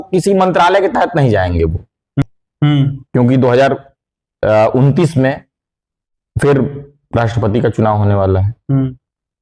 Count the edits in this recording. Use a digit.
1